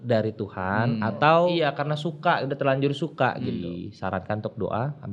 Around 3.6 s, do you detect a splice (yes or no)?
yes